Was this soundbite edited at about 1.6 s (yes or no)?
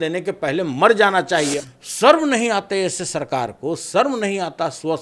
yes